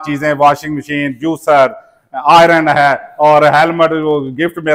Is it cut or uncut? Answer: uncut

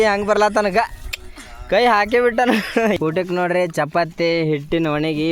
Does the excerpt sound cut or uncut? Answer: cut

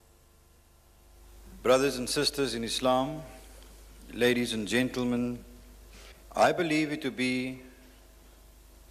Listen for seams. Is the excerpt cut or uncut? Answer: cut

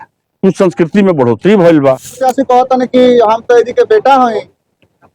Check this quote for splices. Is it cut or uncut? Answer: cut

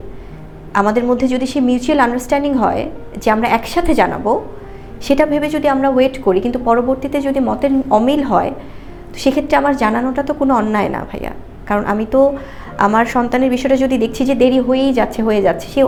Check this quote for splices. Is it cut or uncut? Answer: uncut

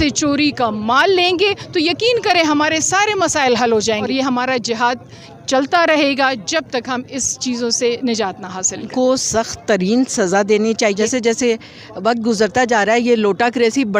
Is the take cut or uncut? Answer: cut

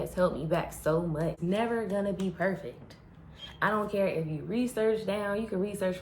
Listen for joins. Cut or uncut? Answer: cut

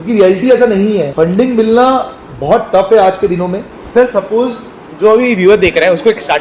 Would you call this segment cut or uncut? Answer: cut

